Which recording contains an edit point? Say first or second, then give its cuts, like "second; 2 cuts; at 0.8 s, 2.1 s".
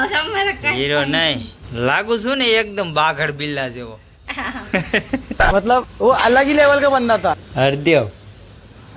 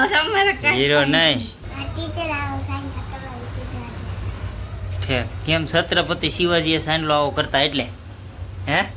second; 1 cut; at 1.6 s